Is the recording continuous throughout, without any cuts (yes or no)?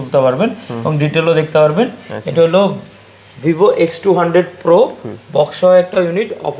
yes